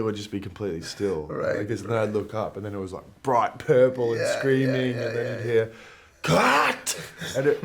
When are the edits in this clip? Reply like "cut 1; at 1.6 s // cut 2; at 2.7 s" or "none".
none